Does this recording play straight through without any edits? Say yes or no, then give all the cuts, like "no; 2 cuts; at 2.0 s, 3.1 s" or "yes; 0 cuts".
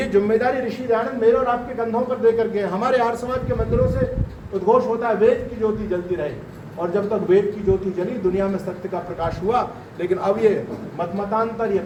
yes; 0 cuts